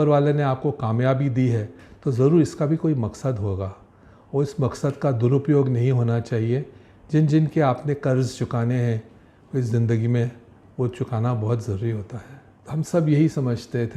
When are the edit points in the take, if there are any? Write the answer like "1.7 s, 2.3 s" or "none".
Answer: 12.6 s